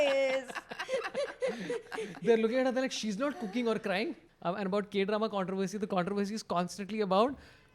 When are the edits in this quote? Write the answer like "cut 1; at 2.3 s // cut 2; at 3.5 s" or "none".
cut 1; at 4.2 s